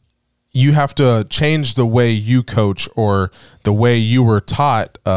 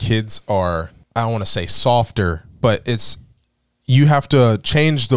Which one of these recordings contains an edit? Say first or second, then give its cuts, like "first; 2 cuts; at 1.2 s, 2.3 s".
second; 1 cut; at 1.0 s